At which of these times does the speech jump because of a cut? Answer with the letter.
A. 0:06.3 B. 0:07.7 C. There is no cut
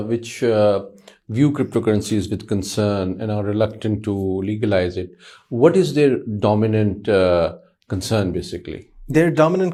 C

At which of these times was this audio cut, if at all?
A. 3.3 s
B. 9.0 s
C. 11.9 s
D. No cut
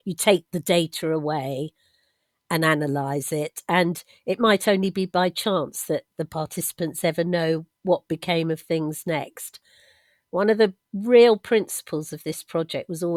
D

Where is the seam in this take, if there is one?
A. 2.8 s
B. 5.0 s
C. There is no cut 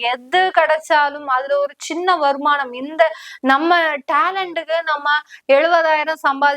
C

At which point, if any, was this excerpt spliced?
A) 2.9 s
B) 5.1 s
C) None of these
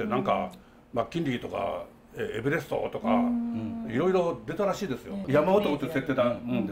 B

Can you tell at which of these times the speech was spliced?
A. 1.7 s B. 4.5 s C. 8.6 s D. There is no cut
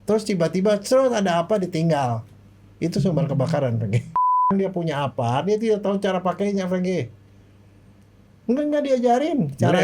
B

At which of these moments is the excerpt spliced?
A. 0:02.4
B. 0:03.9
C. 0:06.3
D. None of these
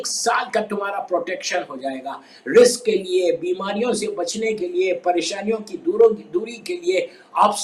D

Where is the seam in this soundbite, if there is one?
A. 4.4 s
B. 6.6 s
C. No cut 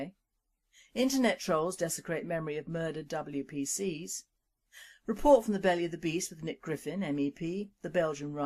A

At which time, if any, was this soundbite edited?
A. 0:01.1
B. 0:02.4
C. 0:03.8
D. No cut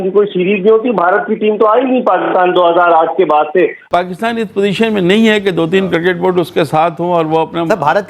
C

